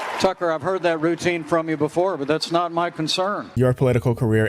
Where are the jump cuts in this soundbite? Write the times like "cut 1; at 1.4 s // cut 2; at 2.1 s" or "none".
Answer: cut 1; at 3.5 s